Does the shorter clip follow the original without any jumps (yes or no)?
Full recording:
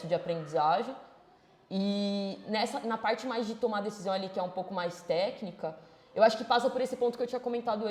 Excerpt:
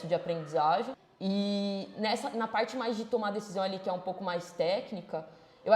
no